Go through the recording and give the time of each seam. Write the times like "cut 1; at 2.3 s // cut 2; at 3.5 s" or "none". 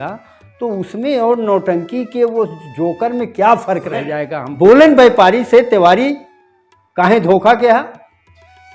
cut 1; at 4.4 s